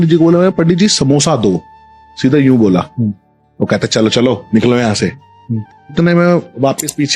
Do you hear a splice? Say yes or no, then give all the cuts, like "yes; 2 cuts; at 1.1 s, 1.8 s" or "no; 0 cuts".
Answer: yes; 1 cut; at 5.9 s